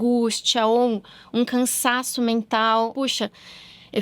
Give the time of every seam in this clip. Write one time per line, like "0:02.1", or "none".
0:02.9